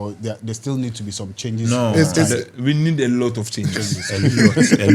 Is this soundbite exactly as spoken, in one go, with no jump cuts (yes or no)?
yes